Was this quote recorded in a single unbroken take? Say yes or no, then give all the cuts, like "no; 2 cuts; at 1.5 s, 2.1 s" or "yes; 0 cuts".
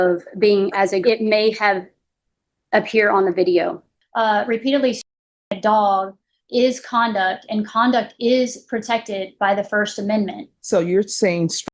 no; 3 cuts; at 1.0 s, 3.9 s, 10.5 s